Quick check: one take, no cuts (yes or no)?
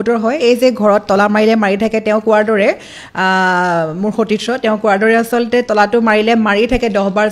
yes